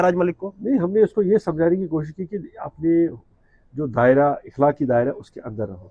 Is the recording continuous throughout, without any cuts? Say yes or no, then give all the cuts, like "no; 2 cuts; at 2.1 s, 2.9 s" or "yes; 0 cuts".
yes; 0 cuts